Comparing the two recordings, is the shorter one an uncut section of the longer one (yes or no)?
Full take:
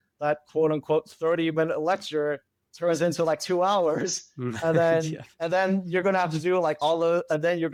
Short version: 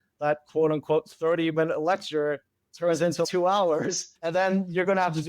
no